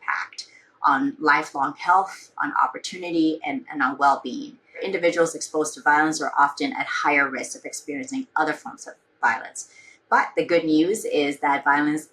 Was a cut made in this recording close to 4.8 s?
yes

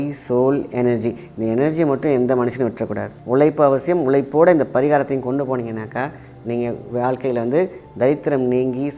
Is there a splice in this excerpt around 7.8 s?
no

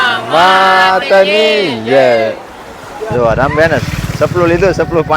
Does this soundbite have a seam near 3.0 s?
yes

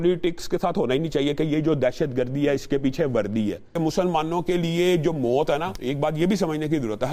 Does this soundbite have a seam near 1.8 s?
no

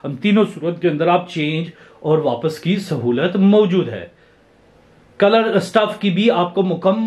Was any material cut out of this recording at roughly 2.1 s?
no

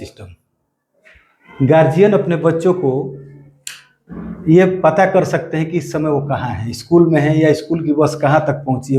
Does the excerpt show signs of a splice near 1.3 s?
no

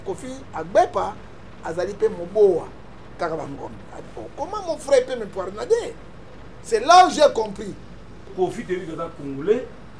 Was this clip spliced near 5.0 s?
no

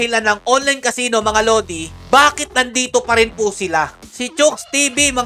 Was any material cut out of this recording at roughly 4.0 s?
yes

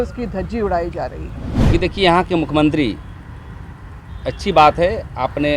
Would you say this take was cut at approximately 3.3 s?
no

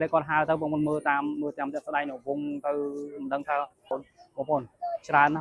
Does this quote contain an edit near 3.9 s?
yes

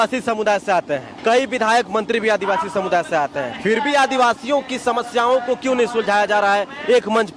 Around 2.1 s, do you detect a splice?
no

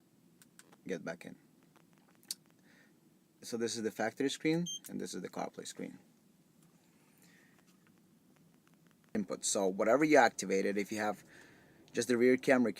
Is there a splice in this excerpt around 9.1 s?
yes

